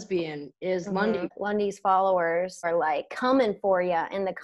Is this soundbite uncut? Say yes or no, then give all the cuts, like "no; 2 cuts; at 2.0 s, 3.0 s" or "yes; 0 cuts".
no; 2 cuts; at 1.4 s, 2.7 s